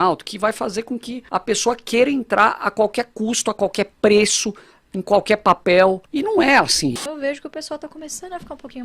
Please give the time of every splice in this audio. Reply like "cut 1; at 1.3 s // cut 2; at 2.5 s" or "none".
cut 1; at 1.1 s // cut 2; at 6.1 s // cut 3; at 7.0 s